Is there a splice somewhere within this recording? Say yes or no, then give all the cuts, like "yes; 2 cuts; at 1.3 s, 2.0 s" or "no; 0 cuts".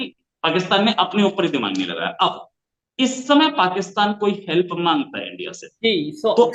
no; 0 cuts